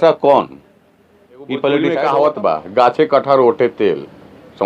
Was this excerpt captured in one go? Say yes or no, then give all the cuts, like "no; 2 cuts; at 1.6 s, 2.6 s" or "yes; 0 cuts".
no; 1 cut; at 2.0 s